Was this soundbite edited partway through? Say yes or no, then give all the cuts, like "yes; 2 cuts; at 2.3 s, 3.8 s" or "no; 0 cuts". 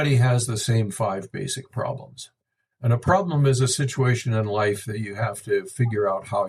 no; 0 cuts